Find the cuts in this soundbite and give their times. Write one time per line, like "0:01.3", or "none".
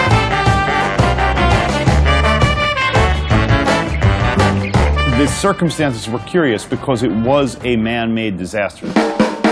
0:07.1